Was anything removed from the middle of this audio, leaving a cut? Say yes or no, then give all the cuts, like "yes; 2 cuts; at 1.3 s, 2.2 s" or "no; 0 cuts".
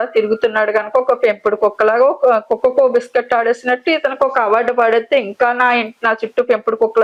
no; 0 cuts